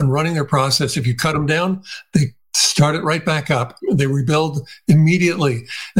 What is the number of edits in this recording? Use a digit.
1